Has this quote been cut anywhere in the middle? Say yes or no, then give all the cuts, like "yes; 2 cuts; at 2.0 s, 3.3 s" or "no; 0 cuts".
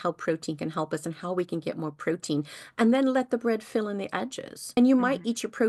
no; 0 cuts